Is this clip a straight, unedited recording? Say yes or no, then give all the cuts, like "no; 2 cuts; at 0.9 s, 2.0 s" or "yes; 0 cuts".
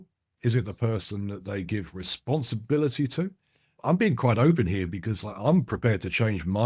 no; 1 cut; at 3.7 s